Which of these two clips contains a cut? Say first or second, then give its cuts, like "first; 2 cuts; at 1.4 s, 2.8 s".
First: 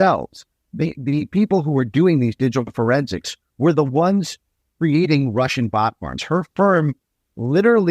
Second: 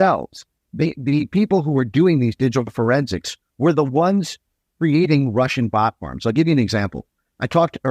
first; 1 cut; at 6.2 s